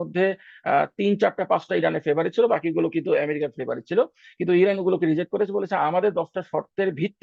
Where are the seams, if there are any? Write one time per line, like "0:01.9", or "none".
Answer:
none